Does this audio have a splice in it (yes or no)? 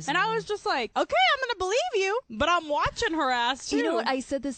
yes